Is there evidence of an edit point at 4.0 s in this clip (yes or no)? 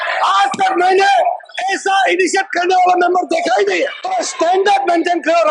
yes